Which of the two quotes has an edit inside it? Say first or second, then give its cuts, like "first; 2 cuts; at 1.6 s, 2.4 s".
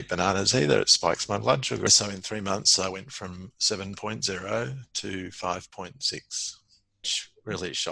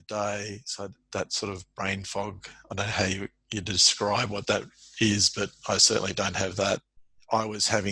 first; 1 cut; at 1.9 s